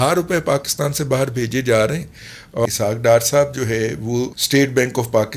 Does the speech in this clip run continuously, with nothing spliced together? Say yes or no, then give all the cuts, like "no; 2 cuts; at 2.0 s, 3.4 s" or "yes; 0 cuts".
no; 2 cuts; at 2.6 s, 4.4 s